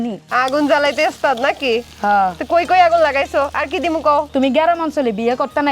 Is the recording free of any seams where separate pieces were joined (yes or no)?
yes